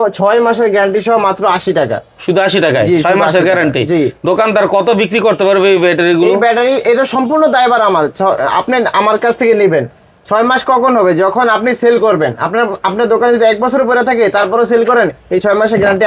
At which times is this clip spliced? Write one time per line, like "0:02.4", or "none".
none